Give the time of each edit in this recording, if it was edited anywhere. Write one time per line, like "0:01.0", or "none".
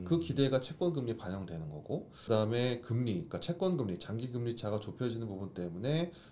0:02.1